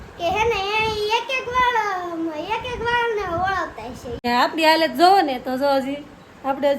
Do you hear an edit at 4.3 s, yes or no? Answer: yes